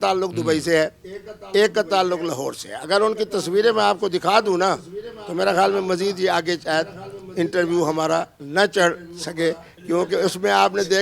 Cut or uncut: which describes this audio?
uncut